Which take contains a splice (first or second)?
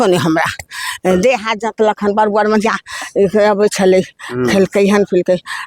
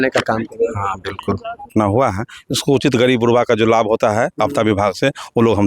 second